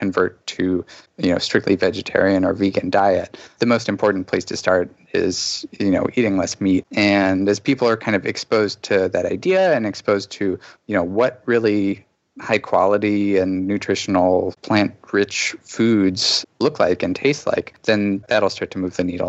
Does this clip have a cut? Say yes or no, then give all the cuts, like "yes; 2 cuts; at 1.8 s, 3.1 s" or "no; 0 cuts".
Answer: yes; 1 cut; at 18.1 s